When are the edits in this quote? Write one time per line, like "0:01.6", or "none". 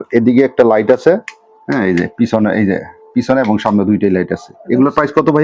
none